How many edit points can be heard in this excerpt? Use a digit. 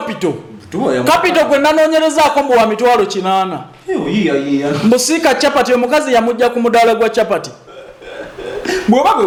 0